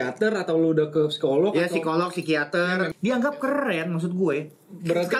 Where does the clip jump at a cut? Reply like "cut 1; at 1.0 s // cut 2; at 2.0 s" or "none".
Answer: cut 1; at 2.9 s